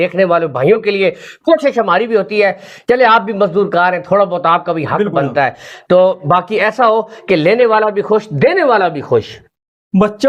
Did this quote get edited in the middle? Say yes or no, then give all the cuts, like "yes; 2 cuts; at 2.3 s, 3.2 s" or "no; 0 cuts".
no; 0 cuts